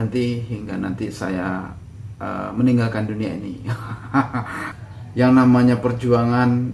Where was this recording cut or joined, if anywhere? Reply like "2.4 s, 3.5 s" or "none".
4.7 s